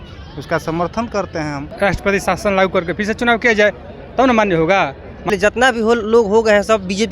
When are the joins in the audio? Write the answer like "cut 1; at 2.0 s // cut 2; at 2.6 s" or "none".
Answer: cut 1; at 1.7 s // cut 2; at 5.3 s